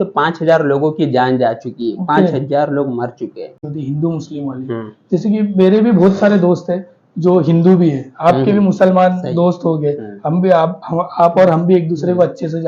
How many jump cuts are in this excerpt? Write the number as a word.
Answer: one